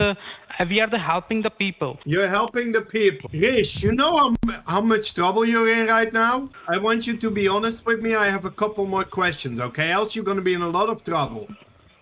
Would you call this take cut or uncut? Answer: cut